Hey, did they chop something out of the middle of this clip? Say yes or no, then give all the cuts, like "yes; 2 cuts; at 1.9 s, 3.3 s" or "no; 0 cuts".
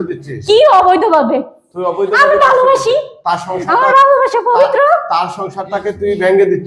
no; 0 cuts